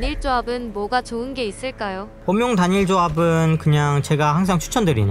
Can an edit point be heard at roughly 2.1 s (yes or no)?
yes